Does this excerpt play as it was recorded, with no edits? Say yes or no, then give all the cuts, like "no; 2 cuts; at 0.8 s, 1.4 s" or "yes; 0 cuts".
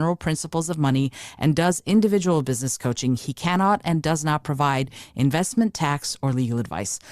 yes; 0 cuts